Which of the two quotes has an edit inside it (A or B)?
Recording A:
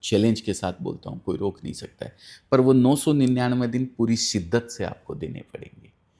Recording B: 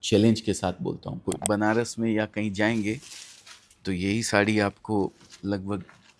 B